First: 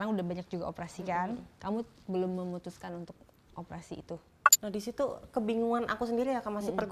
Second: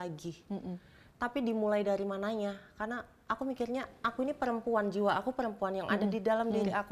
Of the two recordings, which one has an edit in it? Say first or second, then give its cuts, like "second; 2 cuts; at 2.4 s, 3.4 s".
first; 1 cut; at 4.4 s